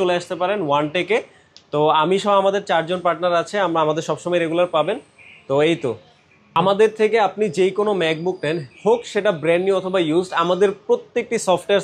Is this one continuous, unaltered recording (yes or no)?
no